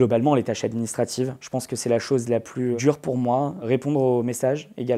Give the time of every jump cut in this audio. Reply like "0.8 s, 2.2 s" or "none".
3.7 s